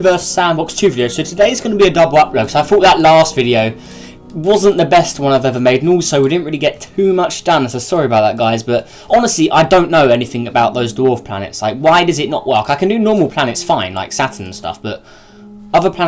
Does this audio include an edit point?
yes; 1 cut; at 8.5 s

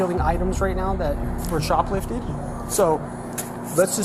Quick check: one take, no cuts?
yes; 0 cuts

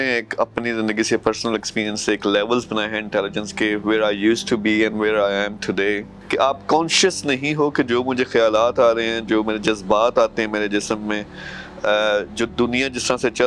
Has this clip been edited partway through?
yes; 1 cut; at 6.2 s

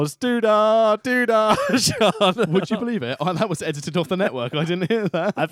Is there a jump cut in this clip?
no; 0 cuts

